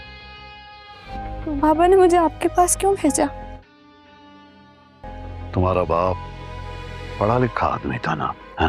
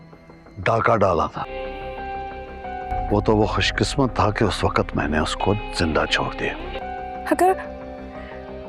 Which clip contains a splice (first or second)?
first